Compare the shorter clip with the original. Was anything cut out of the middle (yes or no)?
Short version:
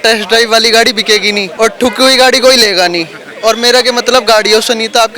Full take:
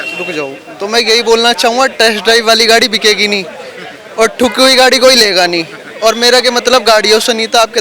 yes